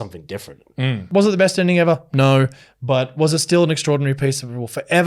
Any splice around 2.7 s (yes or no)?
no